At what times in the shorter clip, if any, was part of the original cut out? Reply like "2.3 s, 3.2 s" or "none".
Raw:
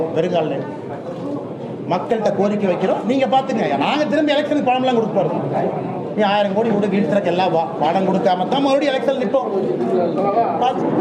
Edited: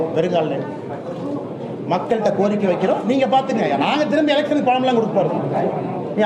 none

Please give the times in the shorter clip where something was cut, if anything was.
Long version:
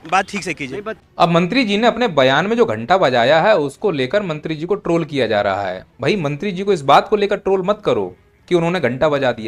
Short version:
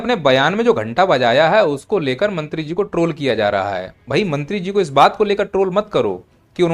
none

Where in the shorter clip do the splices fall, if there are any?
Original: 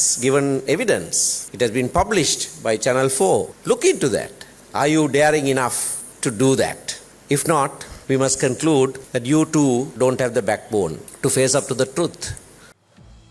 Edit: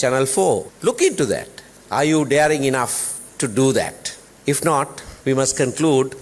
none

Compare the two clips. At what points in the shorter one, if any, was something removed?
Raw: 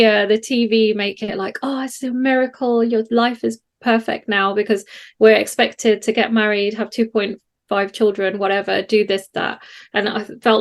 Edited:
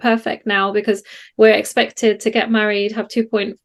none

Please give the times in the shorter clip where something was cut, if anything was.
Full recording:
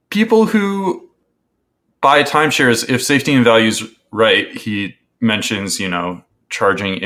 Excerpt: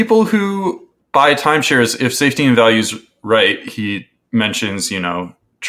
0.9 s

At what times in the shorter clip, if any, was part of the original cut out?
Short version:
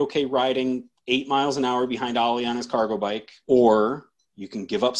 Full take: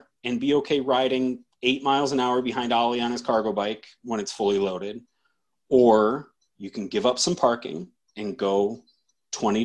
3.3 s

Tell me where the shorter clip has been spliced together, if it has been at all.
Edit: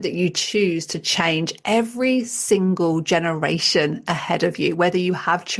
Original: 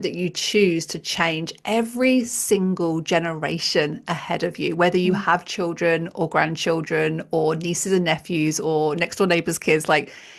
none

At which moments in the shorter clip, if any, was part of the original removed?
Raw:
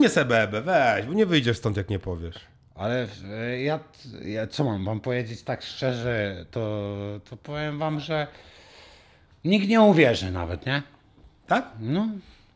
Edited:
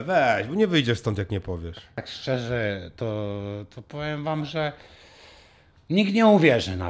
2.1 s

